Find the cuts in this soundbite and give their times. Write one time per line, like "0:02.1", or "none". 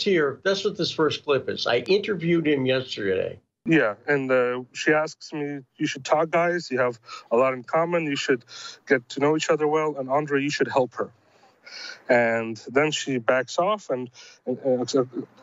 0:03.5